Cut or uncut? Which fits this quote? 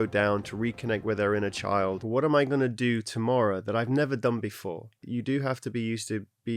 cut